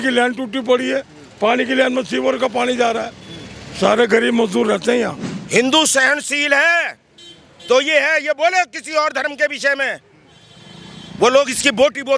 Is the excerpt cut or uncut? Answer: cut